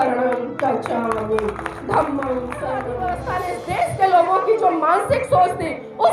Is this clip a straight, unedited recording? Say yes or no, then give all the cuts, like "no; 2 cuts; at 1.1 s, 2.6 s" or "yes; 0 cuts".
no; 1 cut; at 3.0 s